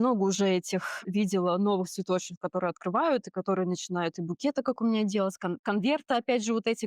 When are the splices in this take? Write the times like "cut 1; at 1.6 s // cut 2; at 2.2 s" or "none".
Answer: cut 1; at 1.0 s